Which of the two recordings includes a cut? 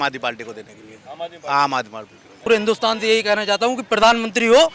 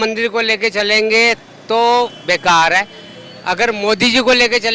first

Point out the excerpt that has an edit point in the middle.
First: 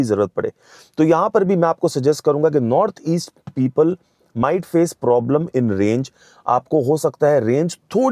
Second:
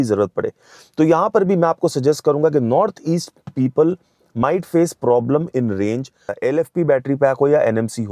second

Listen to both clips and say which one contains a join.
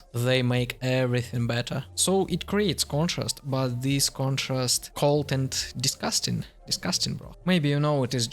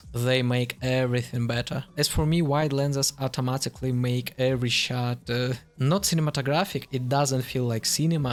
first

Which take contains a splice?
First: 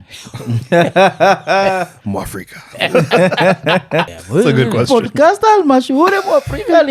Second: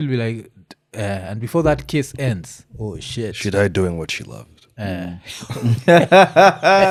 first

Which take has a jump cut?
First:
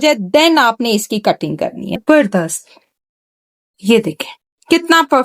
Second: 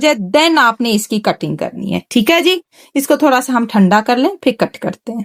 first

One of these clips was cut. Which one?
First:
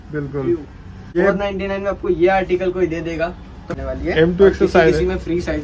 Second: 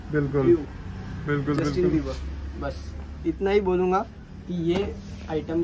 first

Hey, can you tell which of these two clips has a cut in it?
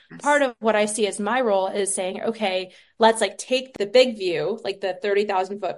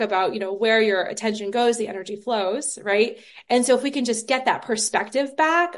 first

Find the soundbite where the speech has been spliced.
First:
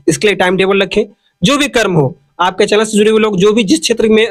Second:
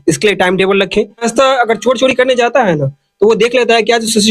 second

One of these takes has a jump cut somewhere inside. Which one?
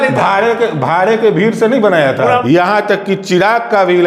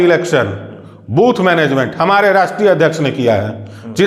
first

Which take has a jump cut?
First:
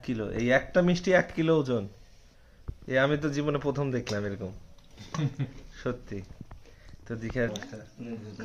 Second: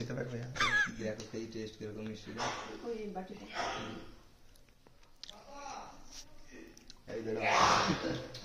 first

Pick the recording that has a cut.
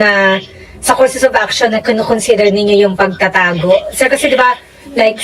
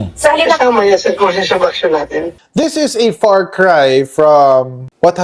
second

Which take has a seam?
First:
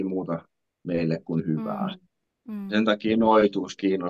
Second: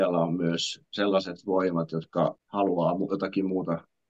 second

